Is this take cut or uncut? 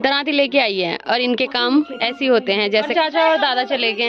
cut